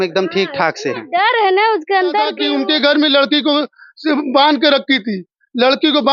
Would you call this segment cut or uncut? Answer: cut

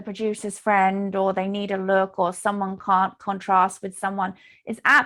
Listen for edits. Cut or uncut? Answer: uncut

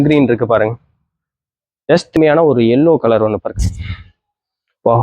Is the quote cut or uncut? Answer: cut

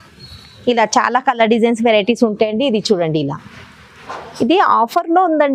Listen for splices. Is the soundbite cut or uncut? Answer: uncut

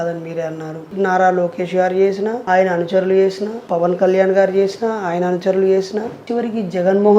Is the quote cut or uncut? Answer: cut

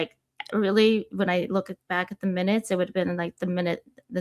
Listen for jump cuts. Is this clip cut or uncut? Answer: uncut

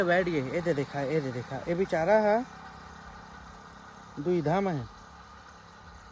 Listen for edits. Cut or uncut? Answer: uncut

